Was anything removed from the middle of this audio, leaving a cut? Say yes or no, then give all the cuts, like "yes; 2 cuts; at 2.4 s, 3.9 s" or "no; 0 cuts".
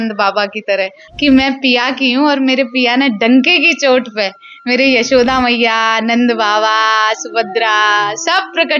yes; 1 cut; at 1.0 s